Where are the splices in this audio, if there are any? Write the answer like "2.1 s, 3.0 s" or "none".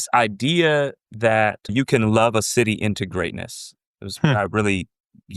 1.6 s